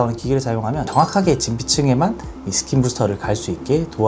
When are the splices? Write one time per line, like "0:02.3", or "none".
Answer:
none

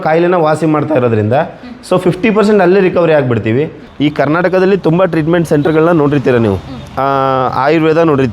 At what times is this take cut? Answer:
0:03.8

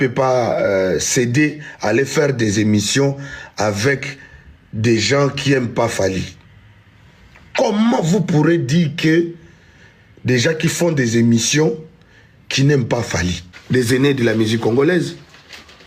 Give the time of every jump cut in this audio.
0:13.5

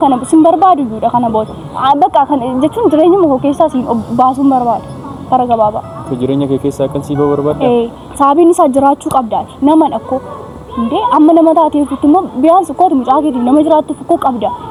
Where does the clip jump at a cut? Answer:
none

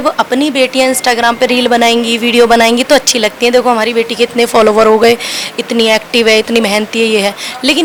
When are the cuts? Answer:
none

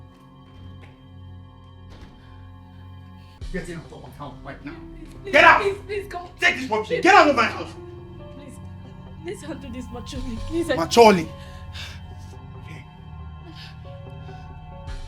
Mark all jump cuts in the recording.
0:03.4

